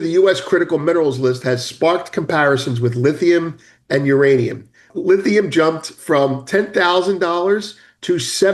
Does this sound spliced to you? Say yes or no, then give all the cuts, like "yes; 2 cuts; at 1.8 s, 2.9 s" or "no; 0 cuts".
yes; 1 cut; at 4.9 s